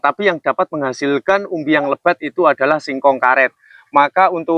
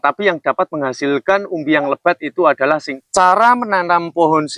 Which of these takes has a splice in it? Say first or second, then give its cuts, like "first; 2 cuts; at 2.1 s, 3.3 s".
second; 1 cut; at 2.9 s